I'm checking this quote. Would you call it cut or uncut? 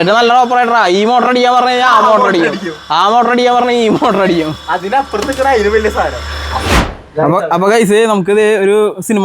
cut